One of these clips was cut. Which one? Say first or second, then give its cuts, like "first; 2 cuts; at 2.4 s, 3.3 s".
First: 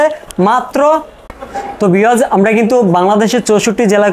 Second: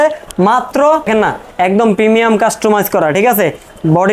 second; 1 cut; at 1.1 s